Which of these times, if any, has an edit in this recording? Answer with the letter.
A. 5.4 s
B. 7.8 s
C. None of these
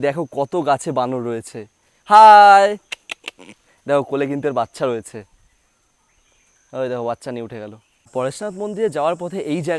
B